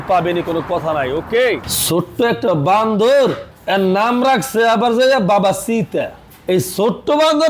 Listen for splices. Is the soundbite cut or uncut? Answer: uncut